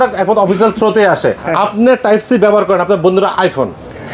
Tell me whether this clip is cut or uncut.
cut